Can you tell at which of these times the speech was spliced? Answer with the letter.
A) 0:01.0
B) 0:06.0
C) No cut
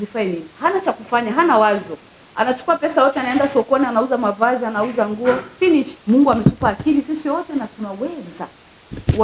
B